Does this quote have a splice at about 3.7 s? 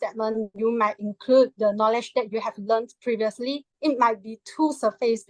yes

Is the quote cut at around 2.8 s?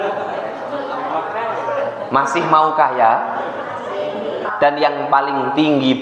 no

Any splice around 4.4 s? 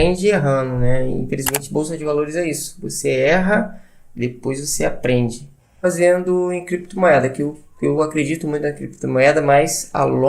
no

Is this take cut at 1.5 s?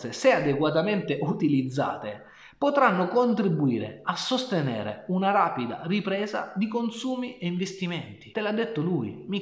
no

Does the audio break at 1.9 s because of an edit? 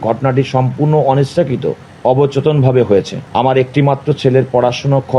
yes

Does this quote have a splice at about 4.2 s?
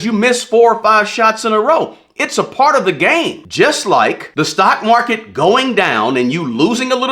yes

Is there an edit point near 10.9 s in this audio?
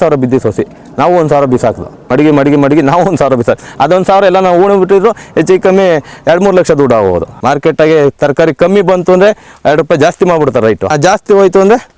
yes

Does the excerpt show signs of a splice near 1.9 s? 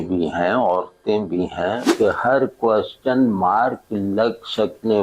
yes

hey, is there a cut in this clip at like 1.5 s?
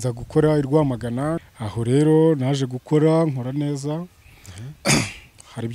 yes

